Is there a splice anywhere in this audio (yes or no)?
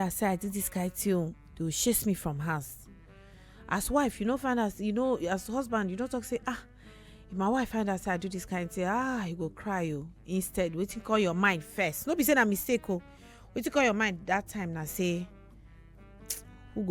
no